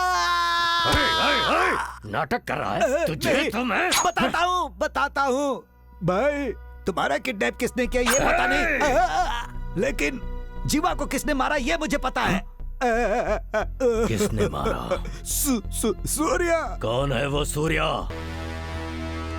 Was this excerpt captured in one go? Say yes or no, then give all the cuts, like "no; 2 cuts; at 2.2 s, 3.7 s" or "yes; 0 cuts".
no; 1 cut; at 18.1 s